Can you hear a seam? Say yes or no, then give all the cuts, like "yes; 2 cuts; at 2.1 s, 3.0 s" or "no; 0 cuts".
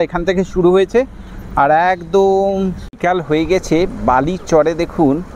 yes; 1 cut; at 2.8 s